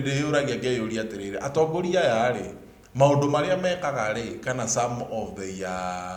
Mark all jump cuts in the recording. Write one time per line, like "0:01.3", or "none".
none